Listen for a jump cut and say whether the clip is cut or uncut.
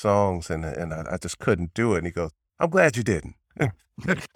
cut